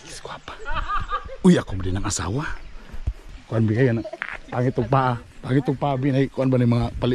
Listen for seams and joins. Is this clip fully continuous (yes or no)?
no